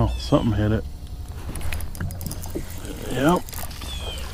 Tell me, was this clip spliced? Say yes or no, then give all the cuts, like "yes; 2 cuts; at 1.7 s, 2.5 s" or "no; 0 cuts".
no; 0 cuts